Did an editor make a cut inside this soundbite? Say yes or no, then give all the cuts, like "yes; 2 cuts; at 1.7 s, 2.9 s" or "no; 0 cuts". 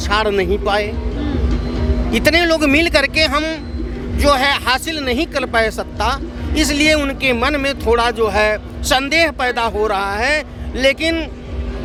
no; 0 cuts